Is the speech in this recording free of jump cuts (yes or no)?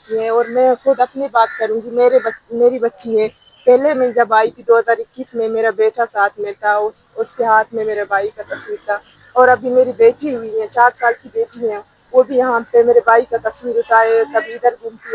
yes